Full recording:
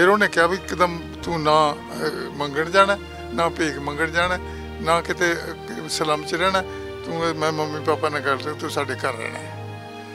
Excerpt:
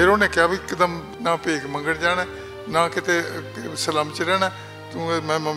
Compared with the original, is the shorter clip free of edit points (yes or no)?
no